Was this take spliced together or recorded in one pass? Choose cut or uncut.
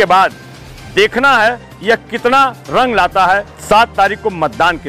cut